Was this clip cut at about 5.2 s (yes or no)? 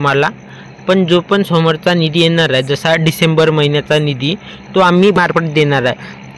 yes